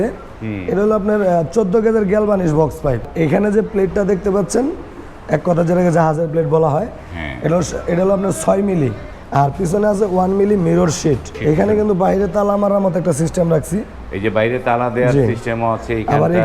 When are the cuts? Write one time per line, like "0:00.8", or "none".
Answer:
0:03.1
0:09.1
0:11.4